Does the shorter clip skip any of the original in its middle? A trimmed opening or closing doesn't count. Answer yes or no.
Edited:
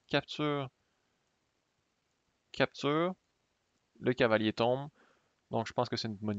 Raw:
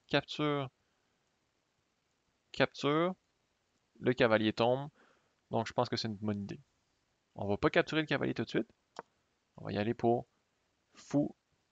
no